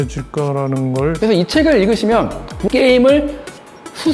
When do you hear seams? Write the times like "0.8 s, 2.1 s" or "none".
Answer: 1.2 s, 2.6 s